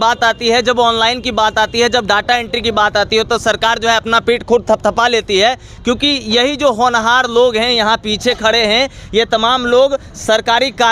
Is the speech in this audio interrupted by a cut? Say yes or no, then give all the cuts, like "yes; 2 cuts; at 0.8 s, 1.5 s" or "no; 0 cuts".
no; 0 cuts